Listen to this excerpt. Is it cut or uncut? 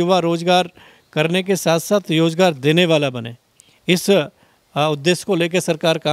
uncut